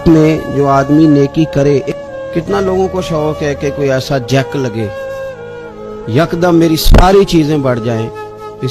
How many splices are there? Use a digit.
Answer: 1